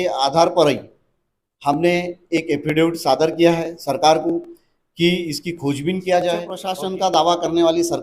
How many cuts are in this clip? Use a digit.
1